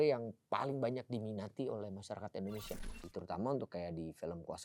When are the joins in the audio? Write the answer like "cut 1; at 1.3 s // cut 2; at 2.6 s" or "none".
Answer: cut 1; at 3.0 s